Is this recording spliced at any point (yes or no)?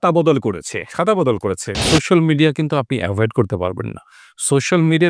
yes